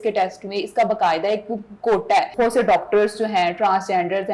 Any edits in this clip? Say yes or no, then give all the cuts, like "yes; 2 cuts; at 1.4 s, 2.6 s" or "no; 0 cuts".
yes; 1 cut; at 2.3 s